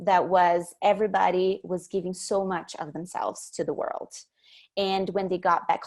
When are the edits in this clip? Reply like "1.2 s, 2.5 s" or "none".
none